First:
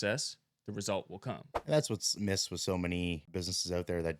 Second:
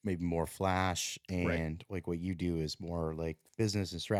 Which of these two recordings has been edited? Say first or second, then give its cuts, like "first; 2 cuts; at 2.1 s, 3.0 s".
first; 2 cuts; at 1.5 s, 3.3 s